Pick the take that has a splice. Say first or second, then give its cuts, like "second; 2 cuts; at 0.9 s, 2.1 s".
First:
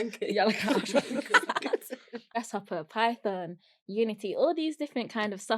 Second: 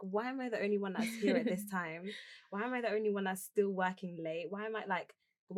first; 1 cut; at 2.4 s